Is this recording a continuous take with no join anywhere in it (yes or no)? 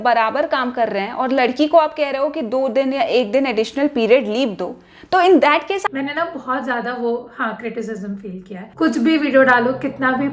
no